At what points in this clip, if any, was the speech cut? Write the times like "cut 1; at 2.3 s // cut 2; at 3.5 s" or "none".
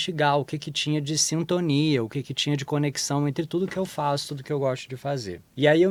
none